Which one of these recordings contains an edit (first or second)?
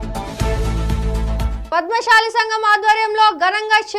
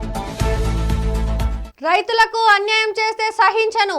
first